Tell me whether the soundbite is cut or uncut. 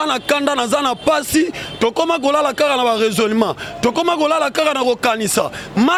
uncut